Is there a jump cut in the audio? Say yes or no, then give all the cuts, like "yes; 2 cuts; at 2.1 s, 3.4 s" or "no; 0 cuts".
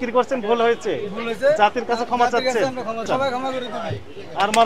yes; 1 cut; at 3.1 s